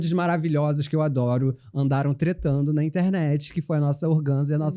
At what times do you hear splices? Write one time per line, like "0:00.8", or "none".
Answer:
none

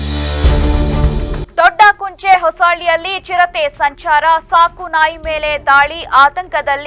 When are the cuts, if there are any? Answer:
0:01.4

